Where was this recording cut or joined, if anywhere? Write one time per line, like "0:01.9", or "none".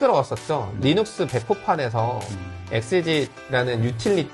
0:03.4